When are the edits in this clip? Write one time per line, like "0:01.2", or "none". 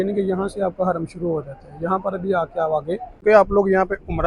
0:03.1